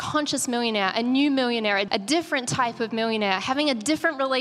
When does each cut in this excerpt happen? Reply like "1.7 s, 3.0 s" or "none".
1.9 s